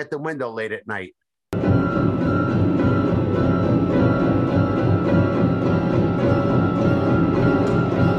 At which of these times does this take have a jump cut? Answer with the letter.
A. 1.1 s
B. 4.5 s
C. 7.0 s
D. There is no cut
D